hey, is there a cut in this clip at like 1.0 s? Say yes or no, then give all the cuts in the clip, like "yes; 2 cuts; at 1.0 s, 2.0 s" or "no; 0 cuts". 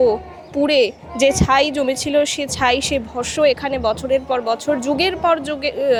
no; 0 cuts